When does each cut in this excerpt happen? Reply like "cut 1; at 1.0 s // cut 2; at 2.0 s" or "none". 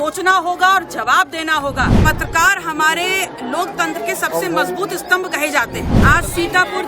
cut 1; at 1.9 s // cut 2; at 5.9 s